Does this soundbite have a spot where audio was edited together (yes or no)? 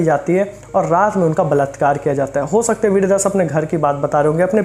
no